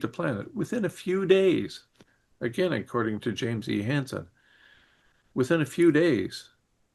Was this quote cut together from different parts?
no; 0 cuts

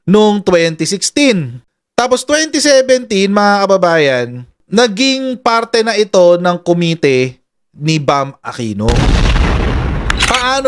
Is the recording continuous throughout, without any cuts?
yes; 0 cuts

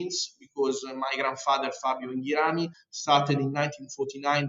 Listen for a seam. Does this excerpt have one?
yes; 1 cut; at 2.9 s

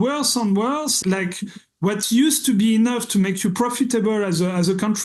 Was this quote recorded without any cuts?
no; 1 cut; at 1.0 s

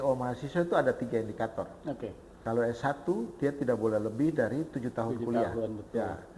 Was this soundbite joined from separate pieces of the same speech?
yes; 1 cut; at 2.3 s

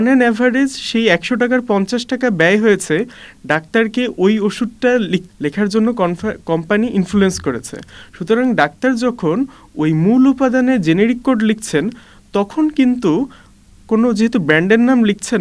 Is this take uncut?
no; 1 cut; at 5.3 s

